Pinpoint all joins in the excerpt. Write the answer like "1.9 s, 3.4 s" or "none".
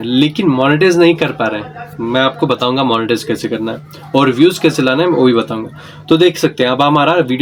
none